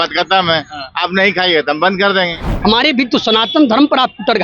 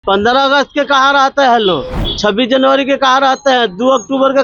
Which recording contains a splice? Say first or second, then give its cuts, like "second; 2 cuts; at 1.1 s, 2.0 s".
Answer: first; 1 cut; at 2.5 s